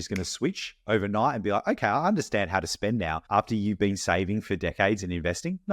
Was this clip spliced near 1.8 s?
no; 1 cut; at 3.2 s

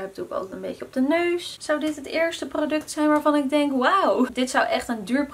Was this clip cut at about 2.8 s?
no; 2 cuts; at 1.5 s, 4.3 s

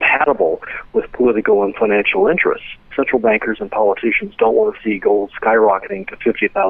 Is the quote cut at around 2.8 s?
yes; 1 cut; at 2.8 s

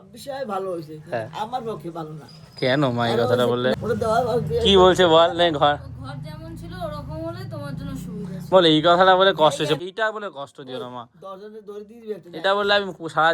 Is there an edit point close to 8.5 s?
no; 2 cuts; at 3.8 s, 9.8 s

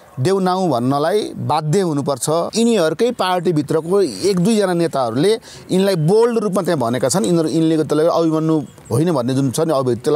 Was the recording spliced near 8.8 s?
yes; 2 cuts; at 2.5 s, 8.8 s

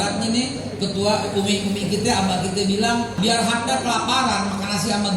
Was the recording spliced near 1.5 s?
no; 1 cut; at 3.1 s

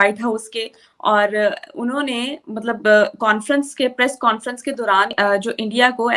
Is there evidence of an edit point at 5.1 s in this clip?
yes; 1 cut; at 5.1 s

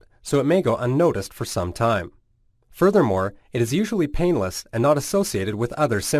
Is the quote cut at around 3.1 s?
no; 1 cut; at 1.8 s

